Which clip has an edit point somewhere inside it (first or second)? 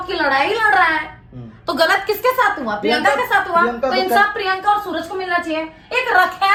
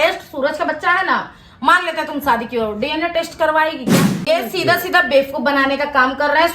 second